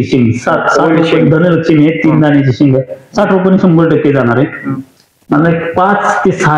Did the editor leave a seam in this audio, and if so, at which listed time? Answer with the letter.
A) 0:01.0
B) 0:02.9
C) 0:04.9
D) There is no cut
D